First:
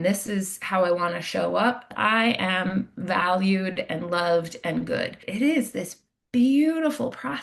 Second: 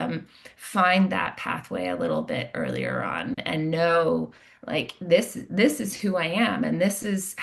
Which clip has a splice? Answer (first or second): first